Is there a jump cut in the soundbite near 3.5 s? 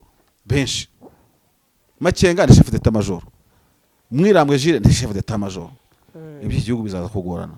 no; 0 cuts

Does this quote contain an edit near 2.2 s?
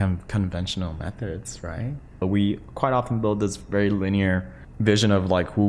yes; 2 cuts; at 2.2 s, 4.6 s

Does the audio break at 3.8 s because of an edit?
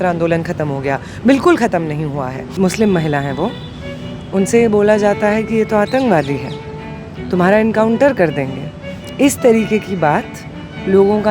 no; 1 cut; at 2.6 s

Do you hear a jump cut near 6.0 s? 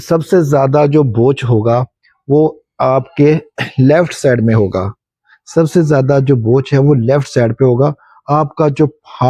no; 0 cuts

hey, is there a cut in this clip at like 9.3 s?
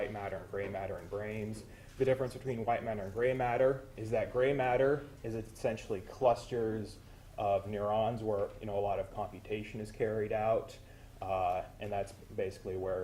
yes; 1 cut; at 9.3 s

